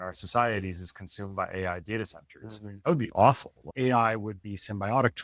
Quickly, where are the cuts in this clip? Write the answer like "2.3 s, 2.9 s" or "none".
3.6 s

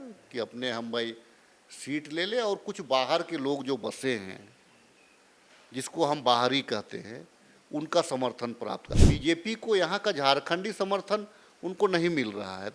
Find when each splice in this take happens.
8.8 s

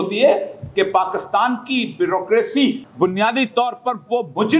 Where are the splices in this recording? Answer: 2.9 s

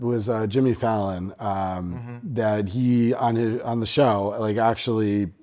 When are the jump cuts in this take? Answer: none

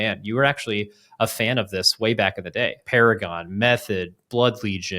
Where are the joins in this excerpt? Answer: 2.8 s

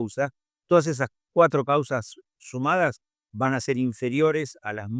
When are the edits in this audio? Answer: none

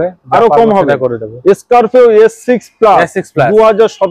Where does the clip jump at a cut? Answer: none

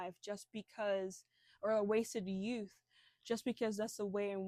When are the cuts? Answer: none

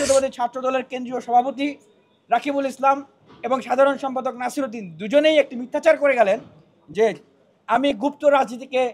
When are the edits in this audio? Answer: none

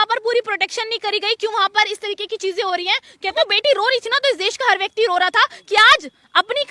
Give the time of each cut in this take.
3.1 s

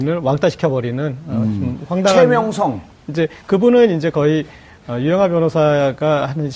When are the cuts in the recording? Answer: none

